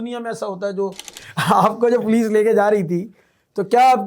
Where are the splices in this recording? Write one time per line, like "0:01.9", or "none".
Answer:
0:01.2